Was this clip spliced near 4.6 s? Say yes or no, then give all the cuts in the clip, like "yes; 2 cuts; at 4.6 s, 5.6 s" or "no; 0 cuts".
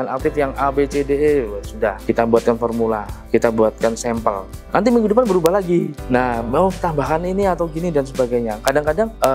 no; 2 cuts; at 2.0 s, 3.1 s